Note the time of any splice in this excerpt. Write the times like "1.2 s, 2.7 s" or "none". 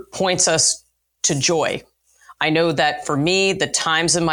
none